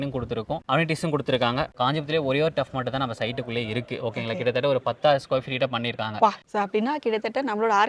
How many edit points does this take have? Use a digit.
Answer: 2